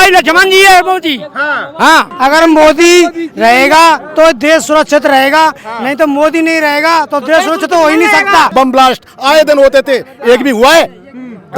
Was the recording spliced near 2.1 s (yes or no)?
yes